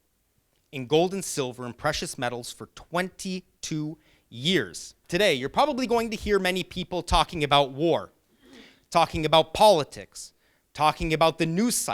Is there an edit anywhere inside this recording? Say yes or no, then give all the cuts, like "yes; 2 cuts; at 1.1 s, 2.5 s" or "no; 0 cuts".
yes; 1 cut; at 5.0 s